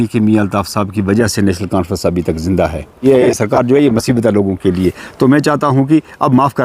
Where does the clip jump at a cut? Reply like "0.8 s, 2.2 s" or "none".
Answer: 3.1 s